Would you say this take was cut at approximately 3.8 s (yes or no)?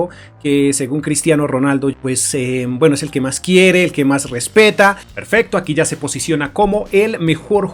no